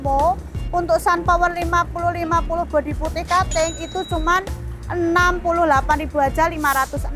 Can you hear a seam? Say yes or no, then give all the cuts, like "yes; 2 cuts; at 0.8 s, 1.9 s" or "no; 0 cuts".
no; 0 cuts